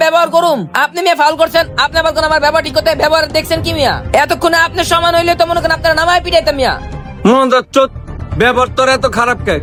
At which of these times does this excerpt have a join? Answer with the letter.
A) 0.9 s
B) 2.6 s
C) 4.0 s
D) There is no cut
D